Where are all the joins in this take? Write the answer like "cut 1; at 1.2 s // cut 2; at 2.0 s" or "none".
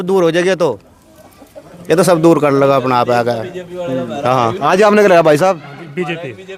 none

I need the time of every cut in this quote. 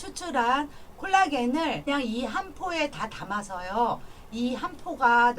cut 1; at 1.8 s

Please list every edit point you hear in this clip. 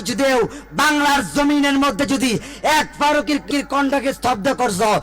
cut 1; at 3.5 s

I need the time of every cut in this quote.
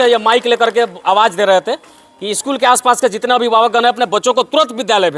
none

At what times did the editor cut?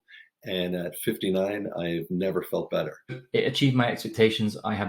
cut 1; at 3.2 s

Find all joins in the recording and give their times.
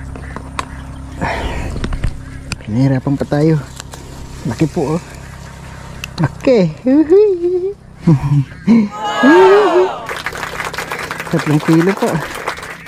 cut 1; at 7.9 s

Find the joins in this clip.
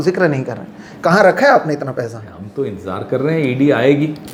none

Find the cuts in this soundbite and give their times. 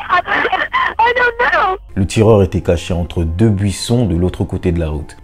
none

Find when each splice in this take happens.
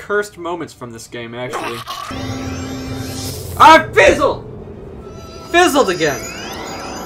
cut 1; at 2.1 s

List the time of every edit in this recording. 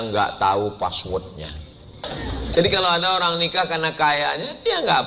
cut 1; at 2.0 s

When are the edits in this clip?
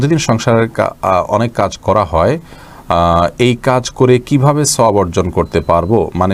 none

